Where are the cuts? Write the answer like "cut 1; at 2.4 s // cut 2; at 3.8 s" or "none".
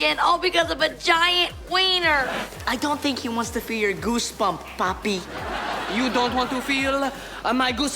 cut 1; at 2.4 s